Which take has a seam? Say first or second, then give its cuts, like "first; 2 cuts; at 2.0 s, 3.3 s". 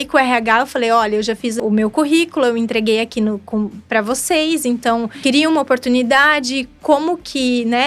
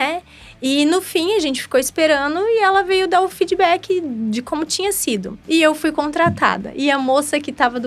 first; 2 cuts; at 1.6 s, 5.1 s